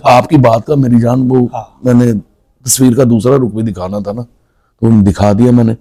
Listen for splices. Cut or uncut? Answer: uncut